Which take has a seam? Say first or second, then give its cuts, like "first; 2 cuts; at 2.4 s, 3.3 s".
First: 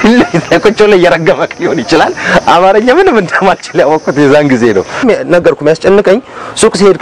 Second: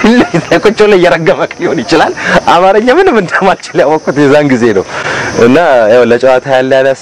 first; 1 cut; at 5.0 s